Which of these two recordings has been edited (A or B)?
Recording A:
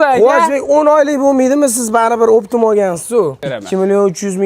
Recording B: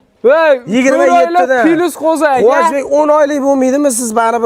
A